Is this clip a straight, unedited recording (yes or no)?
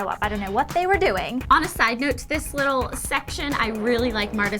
no